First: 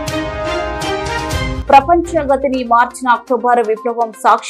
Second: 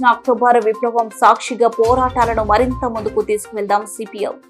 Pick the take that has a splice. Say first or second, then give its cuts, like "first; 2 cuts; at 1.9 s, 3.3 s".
first; 1 cut; at 1.6 s